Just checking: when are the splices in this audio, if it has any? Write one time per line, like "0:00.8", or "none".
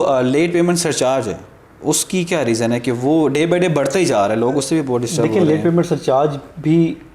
none